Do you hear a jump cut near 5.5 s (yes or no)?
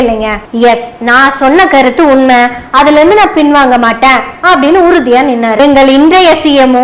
yes